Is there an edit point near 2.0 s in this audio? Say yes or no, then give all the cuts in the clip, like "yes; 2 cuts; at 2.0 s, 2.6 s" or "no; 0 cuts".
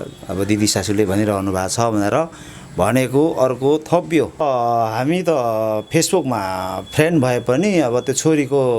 no; 1 cut; at 4.4 s